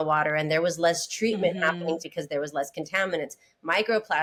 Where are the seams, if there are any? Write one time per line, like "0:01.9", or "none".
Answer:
none